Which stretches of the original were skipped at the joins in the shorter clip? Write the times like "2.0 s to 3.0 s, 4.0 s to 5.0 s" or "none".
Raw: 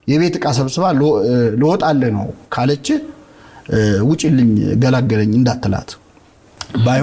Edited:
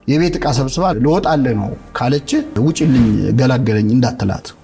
0.9 s to 1.5 s, 3.1 s to 4.0 s